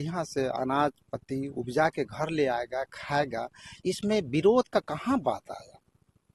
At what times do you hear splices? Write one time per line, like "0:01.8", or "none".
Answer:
none